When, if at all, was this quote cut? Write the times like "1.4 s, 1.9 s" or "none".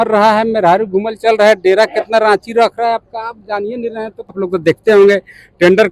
4.4 s